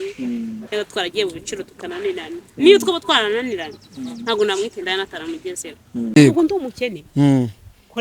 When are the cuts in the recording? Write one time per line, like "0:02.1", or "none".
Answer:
0:06.1